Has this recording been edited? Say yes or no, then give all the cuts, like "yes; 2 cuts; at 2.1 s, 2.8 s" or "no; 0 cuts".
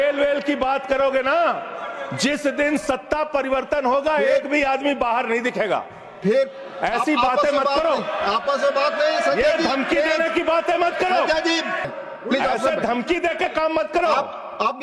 yes; 1 cut; at 11.9 s